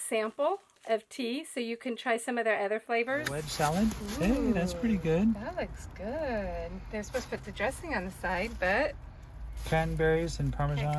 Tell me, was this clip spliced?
yes; 1 cut; at 3.4 s

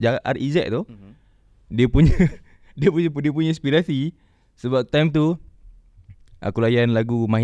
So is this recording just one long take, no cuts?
yes; 0 cuts

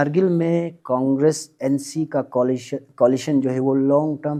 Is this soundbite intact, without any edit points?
yes; 0 cuts

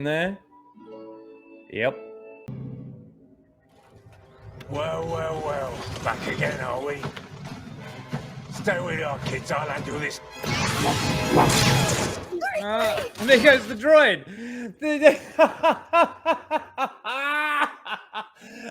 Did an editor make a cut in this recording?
yes; 1 cut; at 2.4 s

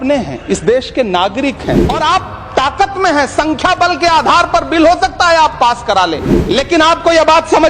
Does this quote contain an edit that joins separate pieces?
yes; 2 cuts; at 1.8 s, 6.3 s

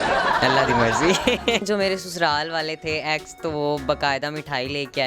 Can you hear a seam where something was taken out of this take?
yes; 1 cut; at 1.6 s

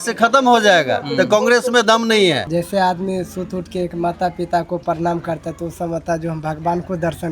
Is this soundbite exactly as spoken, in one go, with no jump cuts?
no; 1 cut; at 2.4 s

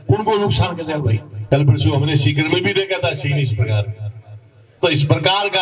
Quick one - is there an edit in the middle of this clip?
yes; 1 cut; at 1.3 s

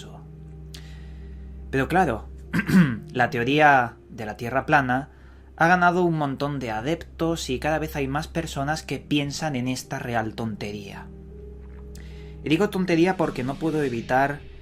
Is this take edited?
yes; 1 cut; at 1.0 s

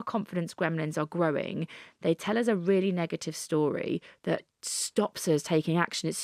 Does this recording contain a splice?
no; 0 cuts

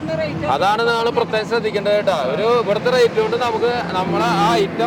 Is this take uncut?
yes; 0 cuts

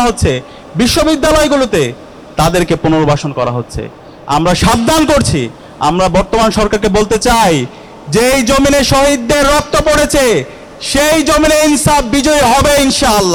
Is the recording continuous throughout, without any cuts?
yes; 0 cuts

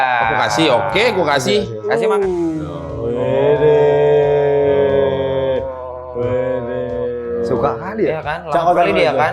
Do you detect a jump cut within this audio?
yes; 1 cut; at 1.8 s

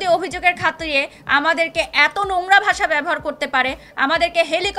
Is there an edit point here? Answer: no; 0 cuts

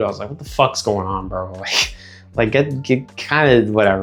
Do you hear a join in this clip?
no; 0 cuts

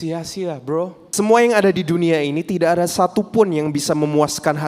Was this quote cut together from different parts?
yes; 1 cut; at 1.0 s

